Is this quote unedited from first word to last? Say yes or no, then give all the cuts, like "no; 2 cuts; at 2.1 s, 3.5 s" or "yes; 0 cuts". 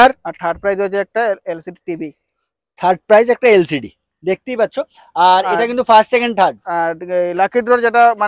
yes; 0 cuts